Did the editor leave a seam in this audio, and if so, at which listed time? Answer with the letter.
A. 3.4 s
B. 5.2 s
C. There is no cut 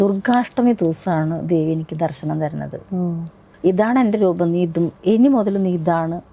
A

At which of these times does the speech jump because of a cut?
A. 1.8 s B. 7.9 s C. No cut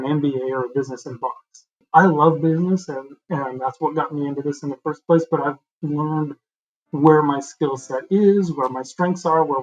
A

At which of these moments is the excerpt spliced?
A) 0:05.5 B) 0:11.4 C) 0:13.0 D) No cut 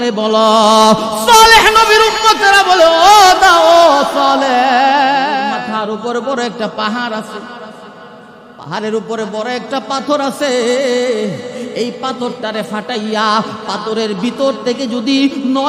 A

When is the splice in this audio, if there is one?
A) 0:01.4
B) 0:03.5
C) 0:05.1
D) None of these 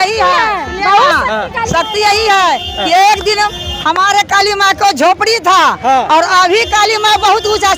D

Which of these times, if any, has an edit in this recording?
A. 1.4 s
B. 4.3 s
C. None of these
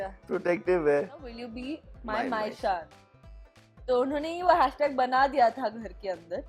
A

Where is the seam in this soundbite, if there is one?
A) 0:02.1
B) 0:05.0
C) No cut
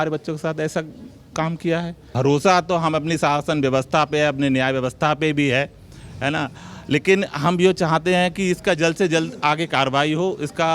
A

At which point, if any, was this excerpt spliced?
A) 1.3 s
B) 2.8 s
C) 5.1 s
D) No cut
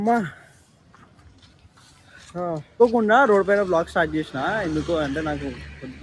B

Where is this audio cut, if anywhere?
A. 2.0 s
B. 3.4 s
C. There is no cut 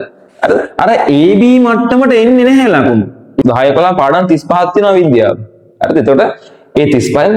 B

